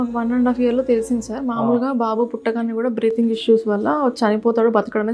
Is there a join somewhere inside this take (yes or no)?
no